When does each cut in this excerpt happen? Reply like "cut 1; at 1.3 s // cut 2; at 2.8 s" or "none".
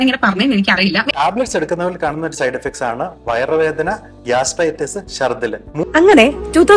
cut 1; at 1.1 s // cut 2; at 5.8 s